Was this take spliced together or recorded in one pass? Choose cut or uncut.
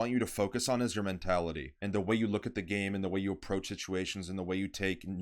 cut